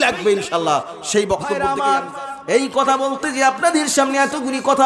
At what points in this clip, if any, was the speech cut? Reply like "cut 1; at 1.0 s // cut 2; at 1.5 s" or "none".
cut 1; at 1.6 s